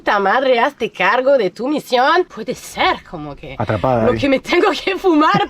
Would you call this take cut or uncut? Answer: cut